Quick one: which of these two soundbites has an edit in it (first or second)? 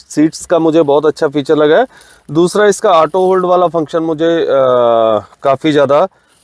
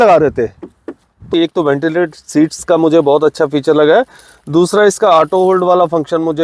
second